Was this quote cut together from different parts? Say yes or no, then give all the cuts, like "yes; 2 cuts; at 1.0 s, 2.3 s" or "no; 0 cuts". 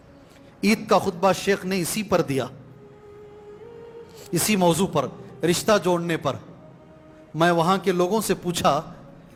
no; 0 cuts